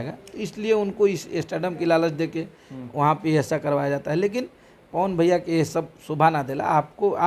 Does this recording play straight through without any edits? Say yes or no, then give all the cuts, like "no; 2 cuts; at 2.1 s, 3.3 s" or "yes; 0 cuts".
yes; 0 cuts